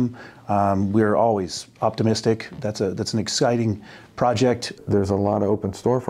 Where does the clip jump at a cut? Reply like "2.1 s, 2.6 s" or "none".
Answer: 4.8 s